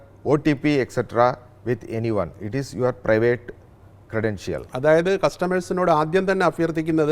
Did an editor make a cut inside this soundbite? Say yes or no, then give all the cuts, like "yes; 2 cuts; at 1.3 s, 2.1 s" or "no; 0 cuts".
no; 0 cuts